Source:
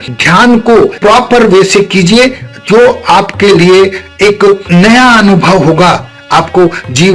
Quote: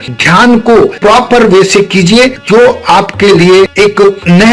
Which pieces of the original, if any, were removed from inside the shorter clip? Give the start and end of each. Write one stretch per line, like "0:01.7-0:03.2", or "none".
0:02.4-0:02.6
0:03.9-0:04.1